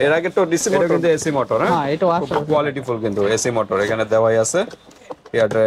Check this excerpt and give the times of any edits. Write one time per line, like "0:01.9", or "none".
0:00.9